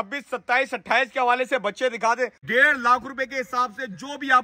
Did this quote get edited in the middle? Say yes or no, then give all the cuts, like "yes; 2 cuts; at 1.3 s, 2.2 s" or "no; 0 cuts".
yes; 1 cut; at 2.4 s